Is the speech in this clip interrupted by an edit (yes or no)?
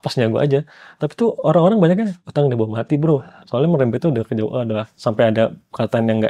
yes